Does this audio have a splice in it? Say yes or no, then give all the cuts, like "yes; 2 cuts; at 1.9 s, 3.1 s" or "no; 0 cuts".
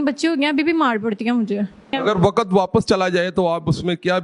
no; 0 cuts